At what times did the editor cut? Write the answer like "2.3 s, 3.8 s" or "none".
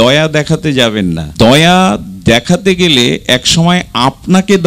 1.2 s